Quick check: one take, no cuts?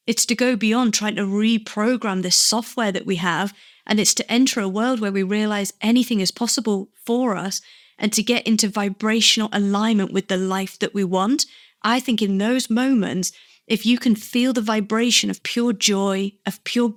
yes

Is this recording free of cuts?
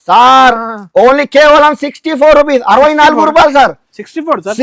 yes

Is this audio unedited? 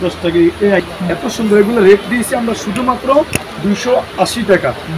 no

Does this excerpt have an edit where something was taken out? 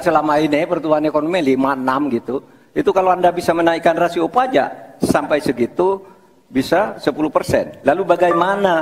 no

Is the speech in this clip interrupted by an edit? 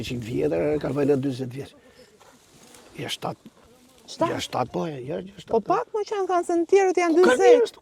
no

